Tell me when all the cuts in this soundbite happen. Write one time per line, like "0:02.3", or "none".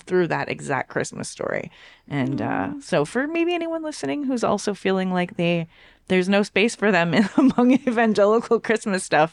none

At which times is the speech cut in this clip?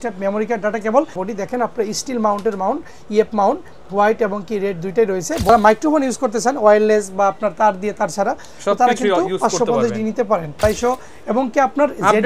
0:01.2
0:05.5
0:10.6

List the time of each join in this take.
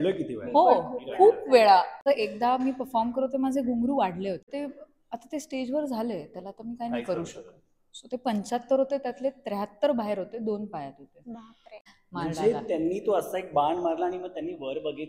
0:02.0
0:04.5
0:11.8

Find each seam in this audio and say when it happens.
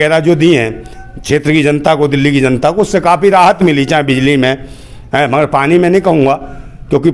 none

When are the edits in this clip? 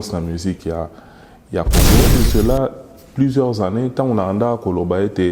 0:02.0

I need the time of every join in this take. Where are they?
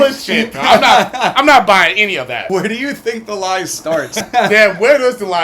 0:02.5
0:04.3

